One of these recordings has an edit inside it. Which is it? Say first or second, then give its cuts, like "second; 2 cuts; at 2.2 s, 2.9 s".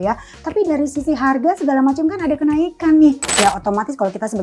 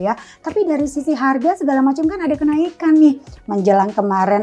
first; 1 cut; at 3.4 s